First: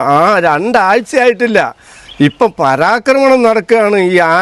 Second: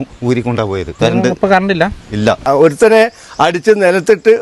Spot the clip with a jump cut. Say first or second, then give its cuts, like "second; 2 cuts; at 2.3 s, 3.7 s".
second; 2 cuts; at 0.9 s, 2.4 s